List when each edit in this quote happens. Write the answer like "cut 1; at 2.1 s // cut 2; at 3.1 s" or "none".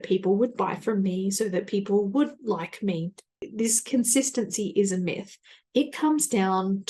cut 1; at 3.4 s